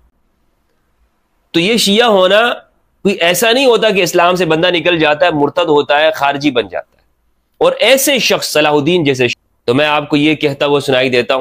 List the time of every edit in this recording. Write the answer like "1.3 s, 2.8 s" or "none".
9.4 s